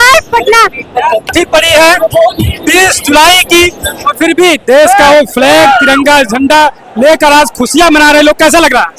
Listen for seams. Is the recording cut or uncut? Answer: cut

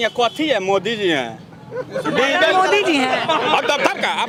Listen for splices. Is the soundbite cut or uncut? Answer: uncut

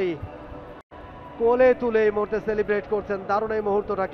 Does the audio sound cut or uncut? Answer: uncut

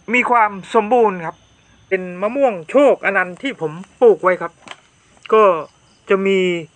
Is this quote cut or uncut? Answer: cut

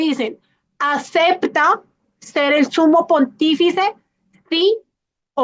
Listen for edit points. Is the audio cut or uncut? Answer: uncut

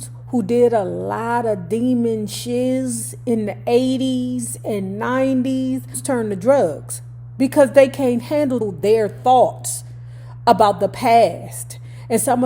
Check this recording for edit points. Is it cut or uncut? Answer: cut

